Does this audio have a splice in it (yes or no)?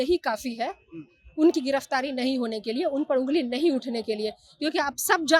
no